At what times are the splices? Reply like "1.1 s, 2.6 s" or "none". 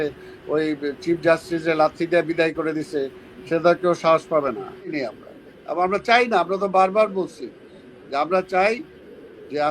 4.9 s